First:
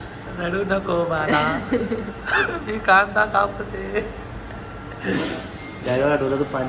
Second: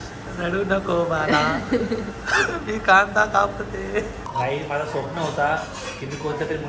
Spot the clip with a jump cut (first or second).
second